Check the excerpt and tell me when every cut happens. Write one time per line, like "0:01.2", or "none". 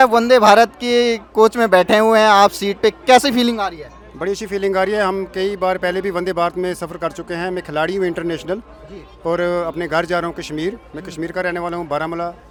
none